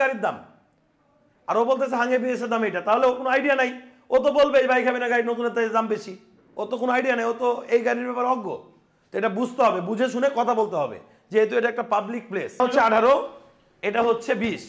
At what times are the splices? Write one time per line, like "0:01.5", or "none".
0:12.6